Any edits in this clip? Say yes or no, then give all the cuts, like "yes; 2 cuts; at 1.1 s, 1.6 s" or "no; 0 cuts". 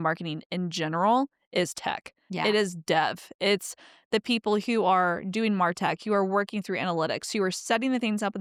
no; 0 cuts